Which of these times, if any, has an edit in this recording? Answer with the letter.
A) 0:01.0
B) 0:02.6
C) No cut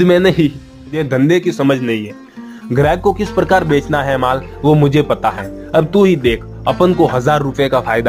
A